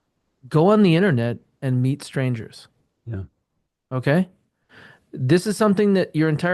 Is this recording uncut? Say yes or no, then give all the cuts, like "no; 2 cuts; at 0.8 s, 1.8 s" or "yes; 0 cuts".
yes; 0 cuts